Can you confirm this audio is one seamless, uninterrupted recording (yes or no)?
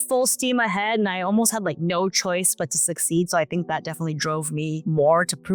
yes